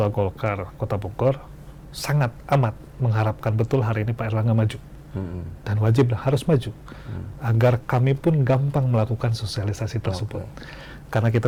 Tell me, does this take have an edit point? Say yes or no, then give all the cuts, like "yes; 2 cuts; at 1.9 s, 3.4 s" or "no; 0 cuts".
no; 0 cuts